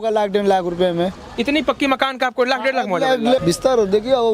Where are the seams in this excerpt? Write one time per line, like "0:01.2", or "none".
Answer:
0:03.4